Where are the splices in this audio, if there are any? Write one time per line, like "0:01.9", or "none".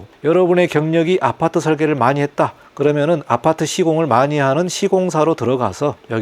none